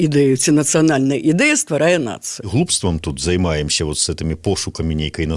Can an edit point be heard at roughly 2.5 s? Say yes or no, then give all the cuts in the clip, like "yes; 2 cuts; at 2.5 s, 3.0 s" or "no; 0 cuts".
yes; 1 cut; at 2.5 s